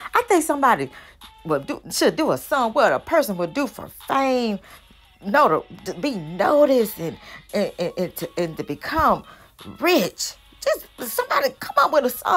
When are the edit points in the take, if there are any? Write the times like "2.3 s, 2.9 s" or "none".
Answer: none